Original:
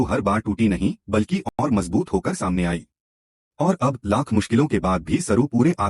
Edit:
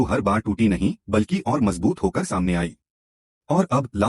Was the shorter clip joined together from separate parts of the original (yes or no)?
yes